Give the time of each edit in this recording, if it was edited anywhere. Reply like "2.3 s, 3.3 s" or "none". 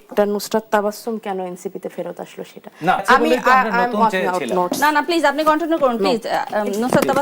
3.0 s